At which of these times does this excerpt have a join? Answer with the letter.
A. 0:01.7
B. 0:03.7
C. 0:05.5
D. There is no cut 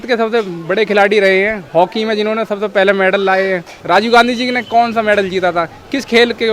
B